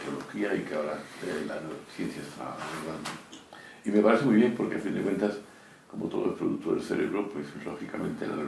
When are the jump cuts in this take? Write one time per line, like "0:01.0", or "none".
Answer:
none

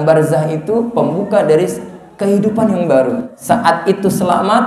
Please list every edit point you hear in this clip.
0:03.3

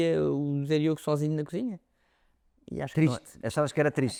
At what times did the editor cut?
none

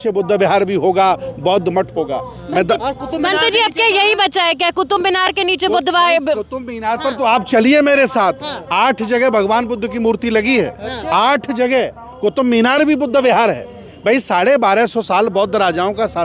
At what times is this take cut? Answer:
none

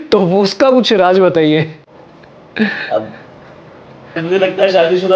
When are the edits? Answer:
0:04.2

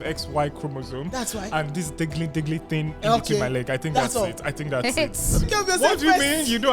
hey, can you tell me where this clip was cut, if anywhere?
0:05.4

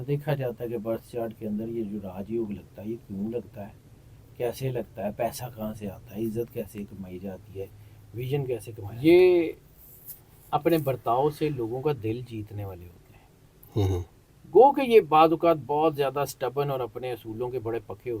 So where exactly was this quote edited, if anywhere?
0:08.8

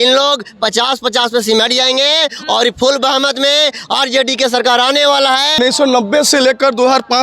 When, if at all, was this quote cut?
0:05.6

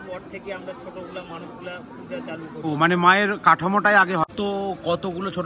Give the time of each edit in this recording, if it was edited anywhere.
0:04.3

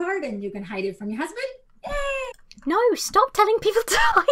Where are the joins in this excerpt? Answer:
none

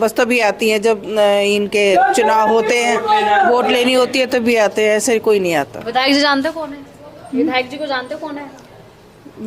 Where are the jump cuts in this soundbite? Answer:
none

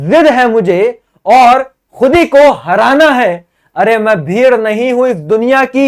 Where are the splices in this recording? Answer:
none

